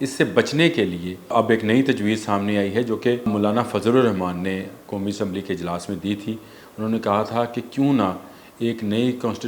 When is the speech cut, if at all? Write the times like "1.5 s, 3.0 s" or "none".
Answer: 1.3 s, 3.3 s

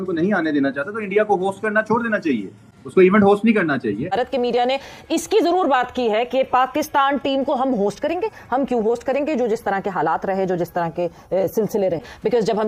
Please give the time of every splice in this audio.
4.0 s

